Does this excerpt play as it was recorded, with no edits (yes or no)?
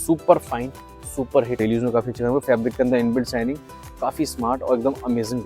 no